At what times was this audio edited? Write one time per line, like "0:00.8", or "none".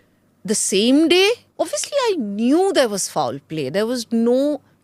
0:01.5

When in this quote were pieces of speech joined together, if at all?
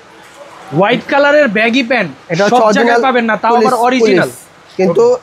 none

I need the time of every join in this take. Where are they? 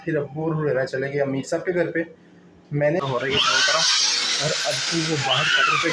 0:03.0

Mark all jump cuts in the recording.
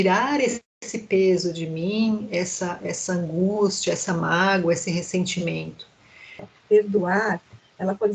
0:06.5

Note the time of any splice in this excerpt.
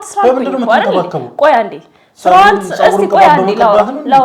none

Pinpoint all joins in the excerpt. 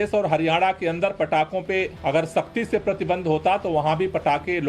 0:01.9

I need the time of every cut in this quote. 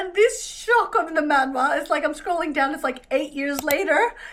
none

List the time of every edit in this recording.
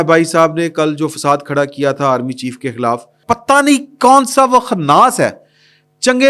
0:03.1

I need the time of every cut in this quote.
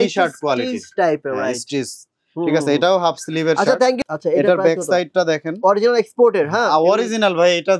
0:04.0

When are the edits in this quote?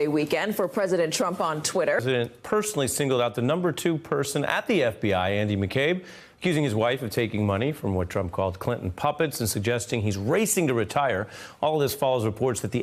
none

